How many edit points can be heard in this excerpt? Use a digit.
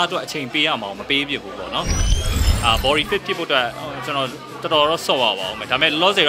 1